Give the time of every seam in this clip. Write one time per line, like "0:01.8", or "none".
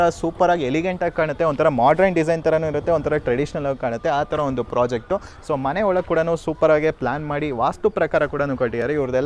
none